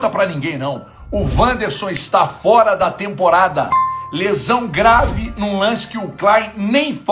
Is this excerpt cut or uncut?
uncut